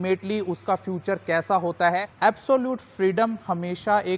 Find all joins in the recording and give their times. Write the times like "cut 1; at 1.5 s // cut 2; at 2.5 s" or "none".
cut 1; at 2.3 s